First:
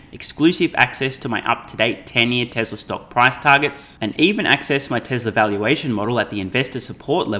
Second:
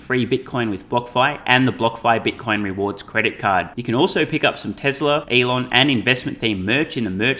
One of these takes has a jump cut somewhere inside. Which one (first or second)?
second